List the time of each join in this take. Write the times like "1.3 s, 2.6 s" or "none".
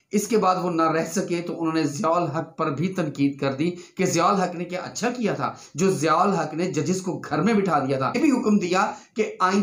8.1 s

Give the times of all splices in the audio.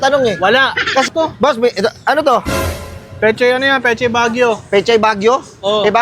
1.0 s

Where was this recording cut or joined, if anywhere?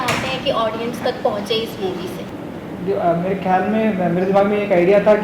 2.2 s

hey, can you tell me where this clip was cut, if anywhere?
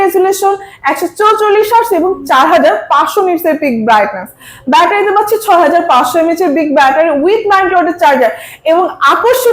none

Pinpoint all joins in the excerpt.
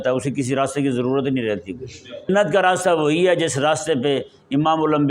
2.3 s

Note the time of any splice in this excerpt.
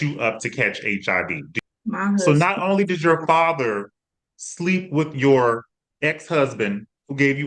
1.5 s

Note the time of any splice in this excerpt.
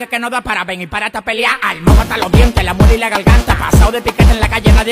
none

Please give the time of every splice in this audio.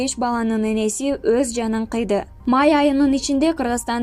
2.3 s

